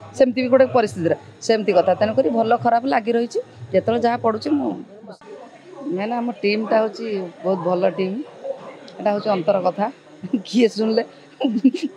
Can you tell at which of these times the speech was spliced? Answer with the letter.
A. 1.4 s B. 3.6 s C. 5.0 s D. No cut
C